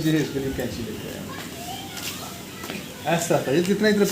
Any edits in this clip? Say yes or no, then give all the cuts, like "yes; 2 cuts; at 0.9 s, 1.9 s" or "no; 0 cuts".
no; 0 cuts